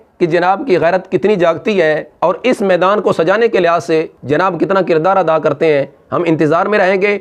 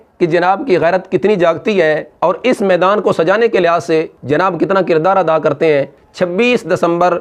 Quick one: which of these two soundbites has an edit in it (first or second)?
second